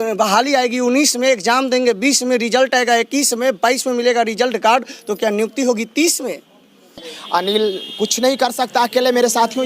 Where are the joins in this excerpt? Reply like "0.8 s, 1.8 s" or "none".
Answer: 7.1 s